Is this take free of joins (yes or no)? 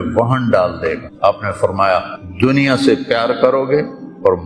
no